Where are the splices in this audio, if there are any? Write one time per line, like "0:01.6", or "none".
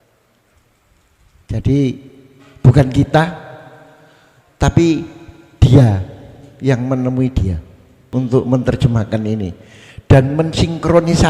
0:08.0